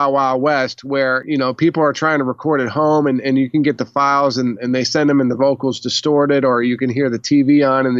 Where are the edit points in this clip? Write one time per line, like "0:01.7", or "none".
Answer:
0:01.2